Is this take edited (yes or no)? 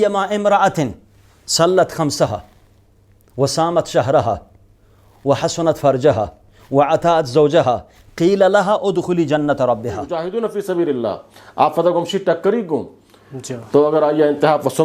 yes